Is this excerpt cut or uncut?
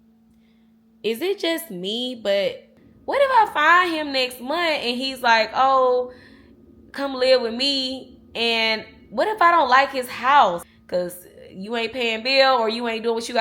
cut